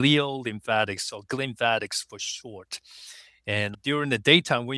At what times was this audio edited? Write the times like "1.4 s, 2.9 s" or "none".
none